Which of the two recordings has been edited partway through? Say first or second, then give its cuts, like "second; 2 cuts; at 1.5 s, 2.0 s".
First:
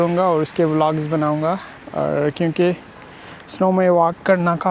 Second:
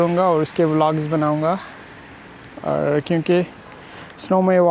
first; 1 cut; at 1.8 s